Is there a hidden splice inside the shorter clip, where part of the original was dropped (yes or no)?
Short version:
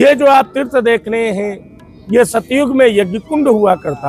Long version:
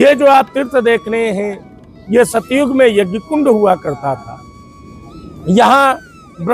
no